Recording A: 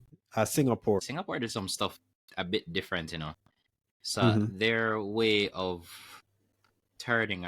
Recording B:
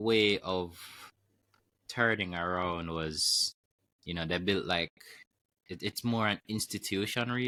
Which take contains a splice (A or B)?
A